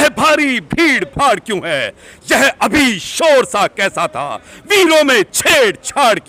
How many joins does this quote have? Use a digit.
0